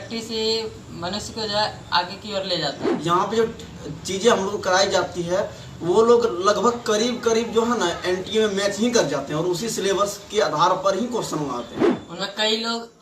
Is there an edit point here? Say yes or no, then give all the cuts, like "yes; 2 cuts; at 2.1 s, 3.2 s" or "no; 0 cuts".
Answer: yes; 2 cuts; at 2.9 s, 11.8 s